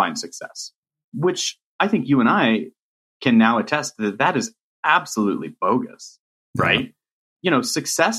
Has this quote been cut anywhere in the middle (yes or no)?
yes